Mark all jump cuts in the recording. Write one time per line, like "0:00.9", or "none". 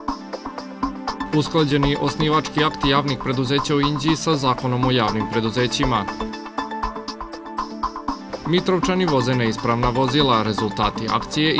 0:00.9